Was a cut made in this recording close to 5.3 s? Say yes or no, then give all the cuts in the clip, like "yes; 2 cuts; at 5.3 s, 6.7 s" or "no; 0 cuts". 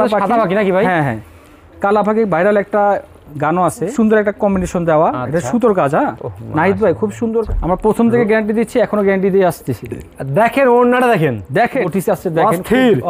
no; 3 cuts; at 3.9 s, 7.5 s, 11.8 s